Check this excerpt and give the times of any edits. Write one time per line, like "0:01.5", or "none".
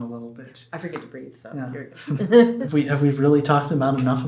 0:02.6